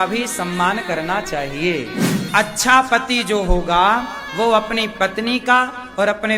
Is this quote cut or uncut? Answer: cut